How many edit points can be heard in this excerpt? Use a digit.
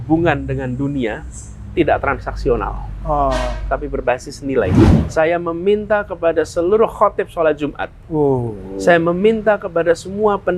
1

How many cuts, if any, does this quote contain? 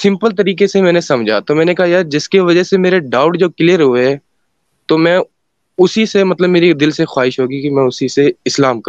0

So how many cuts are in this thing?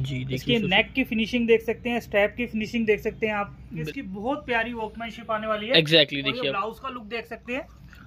1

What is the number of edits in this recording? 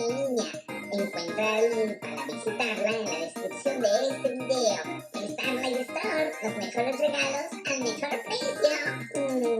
0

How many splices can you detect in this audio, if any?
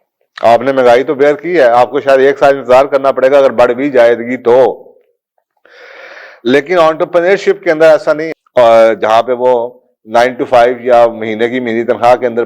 1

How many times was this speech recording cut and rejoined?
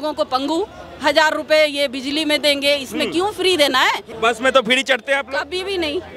1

